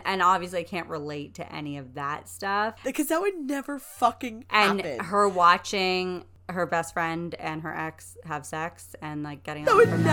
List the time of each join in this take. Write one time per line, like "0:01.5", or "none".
0:02.8
0:06.4

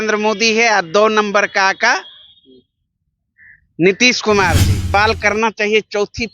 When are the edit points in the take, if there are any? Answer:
0:04.9

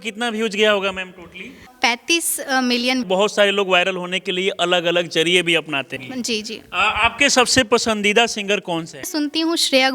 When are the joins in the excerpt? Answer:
0:01.7
0:03.0
0:06.0
0:09.1

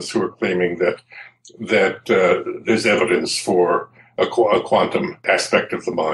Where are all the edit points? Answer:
0:05.2

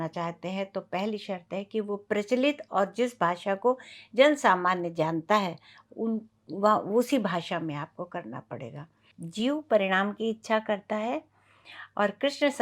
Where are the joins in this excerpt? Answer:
0:09.2

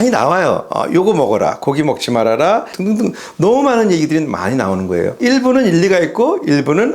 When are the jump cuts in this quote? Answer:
none

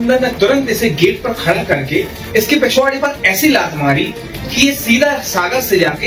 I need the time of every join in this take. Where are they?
none

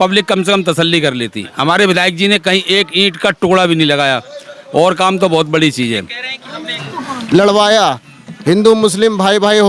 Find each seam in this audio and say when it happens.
0:06.7

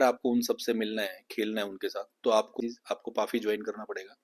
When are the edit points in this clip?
0:02.6

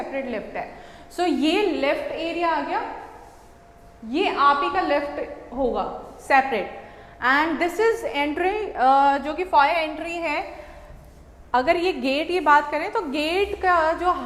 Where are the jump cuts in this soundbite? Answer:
none

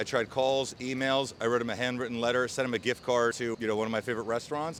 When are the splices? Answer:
none

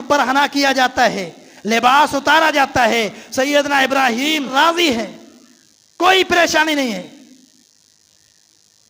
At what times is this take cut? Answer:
0:04.5

